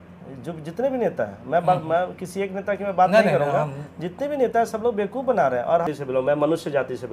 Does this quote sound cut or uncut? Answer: cut